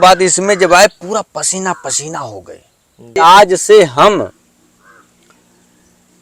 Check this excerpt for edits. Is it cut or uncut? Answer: cut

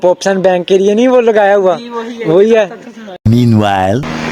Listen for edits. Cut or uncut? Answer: uncut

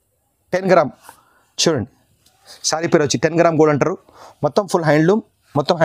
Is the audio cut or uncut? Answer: uncut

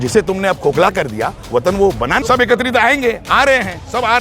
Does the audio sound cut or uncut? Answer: cut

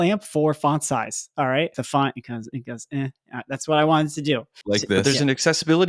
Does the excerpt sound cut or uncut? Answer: cut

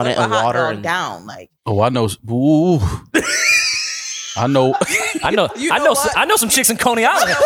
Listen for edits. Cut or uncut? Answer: uncut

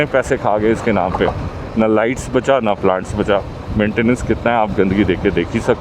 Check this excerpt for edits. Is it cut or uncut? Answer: uncut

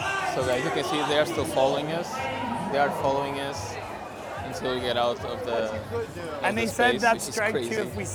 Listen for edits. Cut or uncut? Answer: uncut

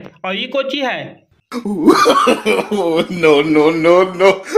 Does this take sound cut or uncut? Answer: cut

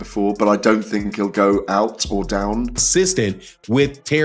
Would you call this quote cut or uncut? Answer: cut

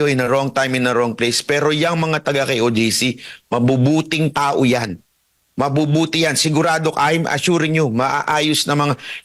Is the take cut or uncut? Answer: uncut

